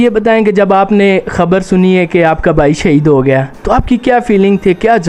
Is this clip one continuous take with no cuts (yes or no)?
yes